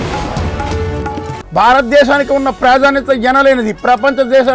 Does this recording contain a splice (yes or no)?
yes